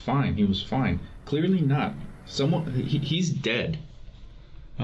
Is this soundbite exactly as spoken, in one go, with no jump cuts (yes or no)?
yes